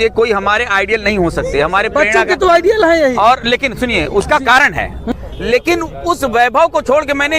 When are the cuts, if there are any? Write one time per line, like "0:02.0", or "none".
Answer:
0:05.0